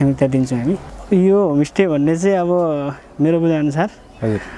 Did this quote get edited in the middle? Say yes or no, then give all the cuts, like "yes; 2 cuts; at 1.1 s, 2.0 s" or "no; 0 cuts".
yes; 1 cut; at 0.9 s